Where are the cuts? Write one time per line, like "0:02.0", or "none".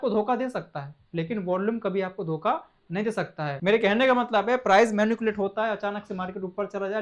0:03.6